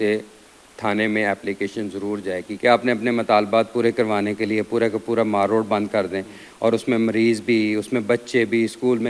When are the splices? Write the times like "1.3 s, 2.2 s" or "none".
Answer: 2.5 s